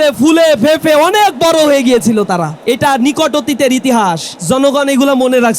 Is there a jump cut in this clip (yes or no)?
yes